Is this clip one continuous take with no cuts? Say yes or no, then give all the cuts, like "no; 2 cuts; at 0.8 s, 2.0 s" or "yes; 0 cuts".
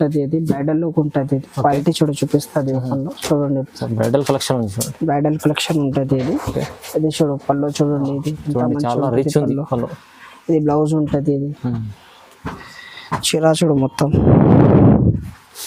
yes; 0 cuts